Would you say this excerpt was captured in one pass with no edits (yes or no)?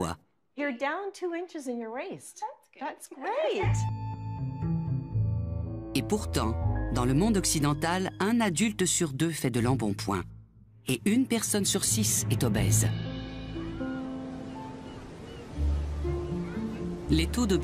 no